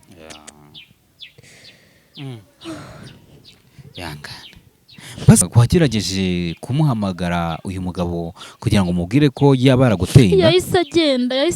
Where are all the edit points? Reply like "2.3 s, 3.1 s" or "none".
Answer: 5.4 s